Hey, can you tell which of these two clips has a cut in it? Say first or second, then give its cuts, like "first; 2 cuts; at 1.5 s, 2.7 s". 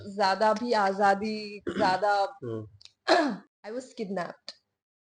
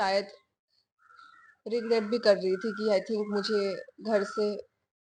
first; 1 cut; at 3.5 s